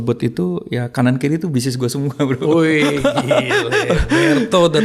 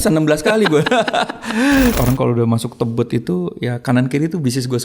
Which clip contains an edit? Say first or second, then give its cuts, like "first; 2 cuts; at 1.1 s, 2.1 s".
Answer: second; 1 cut; at 2.0 s